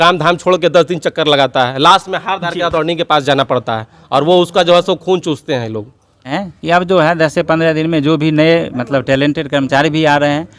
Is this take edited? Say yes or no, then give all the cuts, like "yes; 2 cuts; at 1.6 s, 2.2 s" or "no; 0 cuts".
yes; 1 cut; at 6.3 s